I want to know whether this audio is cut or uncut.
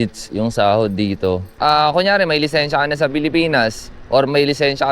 cut